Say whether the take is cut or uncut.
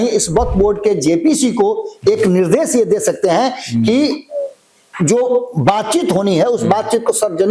uncut